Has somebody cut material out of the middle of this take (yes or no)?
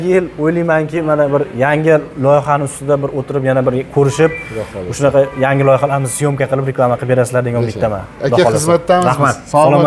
no